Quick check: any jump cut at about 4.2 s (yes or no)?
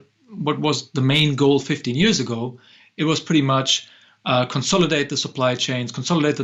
no